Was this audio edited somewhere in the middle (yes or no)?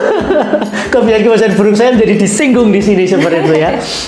no